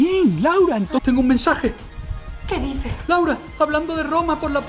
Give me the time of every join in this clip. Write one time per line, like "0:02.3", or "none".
0:01.0
0:03.0